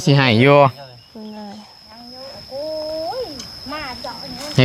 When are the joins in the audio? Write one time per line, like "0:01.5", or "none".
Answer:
none

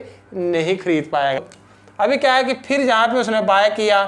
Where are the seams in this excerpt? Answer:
0:01.9

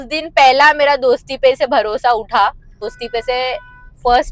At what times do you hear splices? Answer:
0:02.9

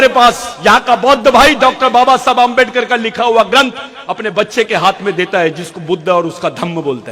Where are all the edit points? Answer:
none

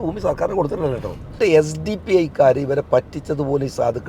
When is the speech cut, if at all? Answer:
0:01.4

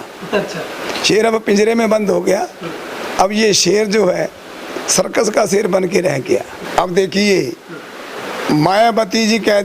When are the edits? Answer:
0:06.6

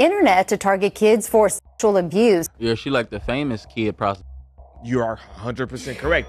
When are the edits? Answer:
0:02.5

